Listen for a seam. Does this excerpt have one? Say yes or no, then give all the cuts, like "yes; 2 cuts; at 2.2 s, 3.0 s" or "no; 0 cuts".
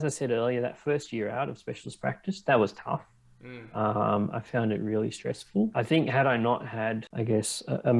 yes; 2 cuts; at 5.7 s, 7.1 s